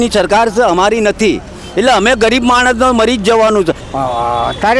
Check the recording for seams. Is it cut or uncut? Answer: cut